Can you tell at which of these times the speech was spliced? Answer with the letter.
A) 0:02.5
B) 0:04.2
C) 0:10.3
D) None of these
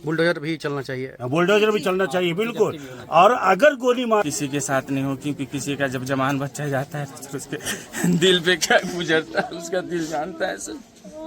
B